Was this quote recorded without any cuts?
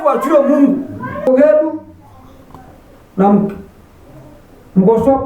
no; 1 cut; at 1.3 s

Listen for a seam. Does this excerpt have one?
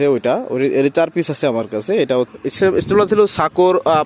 yes; 1 cut; at 2.3 s

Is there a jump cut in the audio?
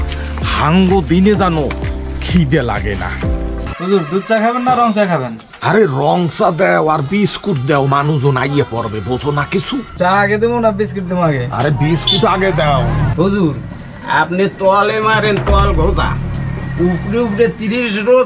yes; 2 cuts; at 3.7 s, 13.1 s

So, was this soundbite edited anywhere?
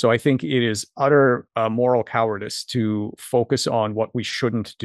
no; 0 cuts

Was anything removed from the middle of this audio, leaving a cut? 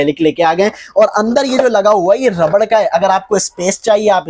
no; 0 cuts

